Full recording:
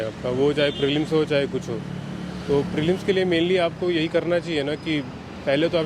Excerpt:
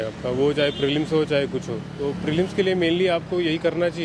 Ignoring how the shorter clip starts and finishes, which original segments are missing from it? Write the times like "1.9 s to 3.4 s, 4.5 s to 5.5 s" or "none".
1.9 s to 2.4 s

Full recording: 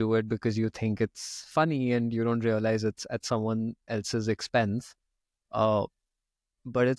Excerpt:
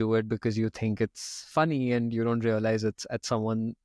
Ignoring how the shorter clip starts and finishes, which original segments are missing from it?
none

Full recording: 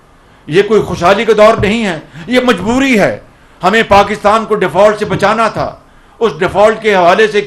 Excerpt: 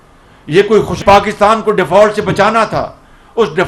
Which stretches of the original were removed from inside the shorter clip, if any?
1.0 s to 3.8 s

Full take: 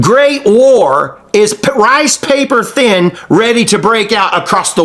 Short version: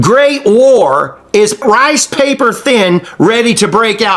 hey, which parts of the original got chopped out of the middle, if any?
1.6 s to 1.7 s

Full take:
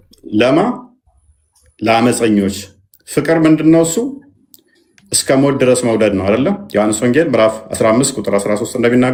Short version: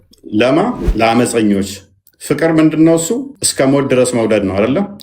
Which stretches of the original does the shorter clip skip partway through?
0.8 s to 1.7 s, 4.2 s to 5.1 s

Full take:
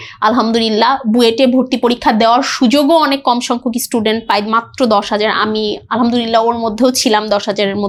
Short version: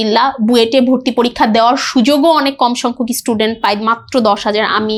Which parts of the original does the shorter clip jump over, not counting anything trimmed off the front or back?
none

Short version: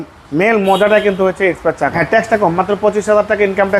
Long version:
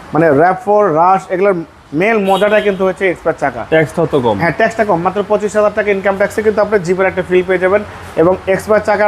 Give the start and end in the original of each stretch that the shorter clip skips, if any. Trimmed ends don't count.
3.6 s to 4.5 s

